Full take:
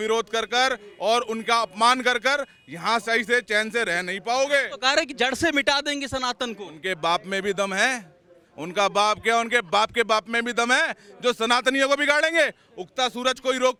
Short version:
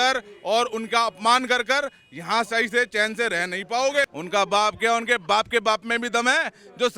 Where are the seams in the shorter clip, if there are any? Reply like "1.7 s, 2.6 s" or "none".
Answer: 4.1 s